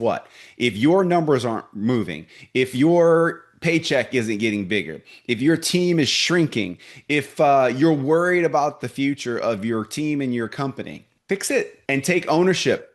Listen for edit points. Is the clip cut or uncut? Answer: cut